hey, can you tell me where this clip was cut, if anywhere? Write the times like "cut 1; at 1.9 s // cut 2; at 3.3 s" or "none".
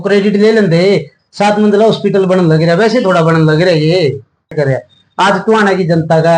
cut 1; at 4.5 s